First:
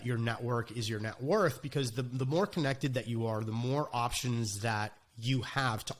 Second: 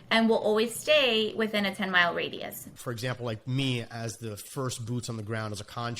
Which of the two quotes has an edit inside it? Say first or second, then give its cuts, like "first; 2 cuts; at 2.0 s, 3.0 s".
second; 1 cut; at 2.7 s